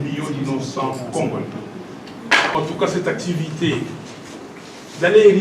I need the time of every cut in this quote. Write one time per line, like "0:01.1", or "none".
0:02.5